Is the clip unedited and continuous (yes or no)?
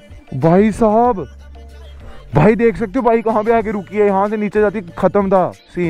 yes